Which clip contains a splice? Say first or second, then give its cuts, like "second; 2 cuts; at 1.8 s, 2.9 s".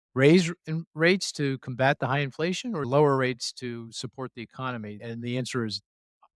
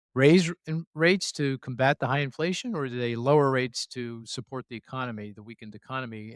first; 2 cuts; at 2.8 s, 5.0 s